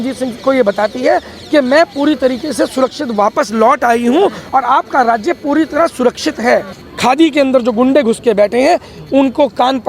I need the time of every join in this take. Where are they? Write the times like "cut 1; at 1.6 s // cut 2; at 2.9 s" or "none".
cut 1; at 6.8 s